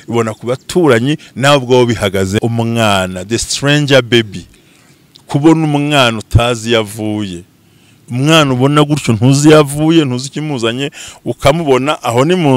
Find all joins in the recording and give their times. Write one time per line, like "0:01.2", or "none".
0:02.4